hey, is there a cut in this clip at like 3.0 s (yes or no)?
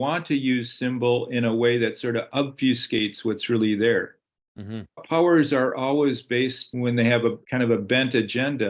no